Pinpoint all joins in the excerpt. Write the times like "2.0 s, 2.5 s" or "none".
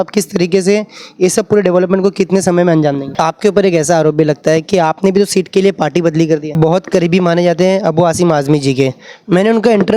3.1 s, 6.5 s